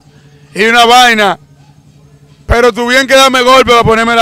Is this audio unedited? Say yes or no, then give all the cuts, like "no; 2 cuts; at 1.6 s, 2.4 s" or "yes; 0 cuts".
yes; 0 cuts